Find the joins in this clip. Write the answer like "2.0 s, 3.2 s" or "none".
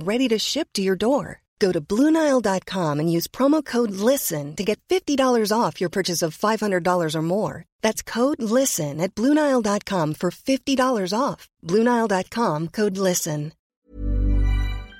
13.8 s